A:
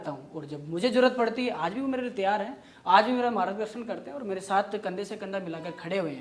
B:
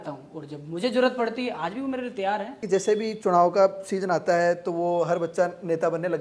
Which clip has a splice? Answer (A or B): B